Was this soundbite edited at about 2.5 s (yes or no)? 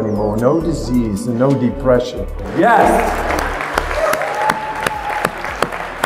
yes